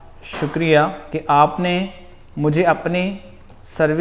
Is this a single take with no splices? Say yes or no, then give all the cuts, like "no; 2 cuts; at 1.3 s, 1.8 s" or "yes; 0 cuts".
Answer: no; 1 cut; at 1.1 s